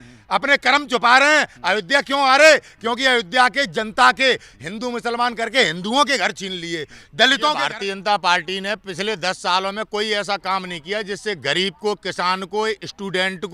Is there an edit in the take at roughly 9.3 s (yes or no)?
no